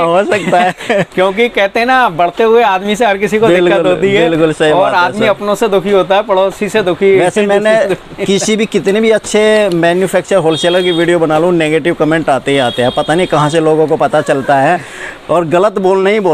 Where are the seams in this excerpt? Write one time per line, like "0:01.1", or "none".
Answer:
none